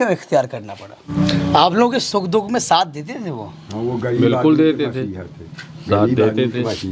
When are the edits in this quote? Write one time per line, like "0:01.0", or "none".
0:01.1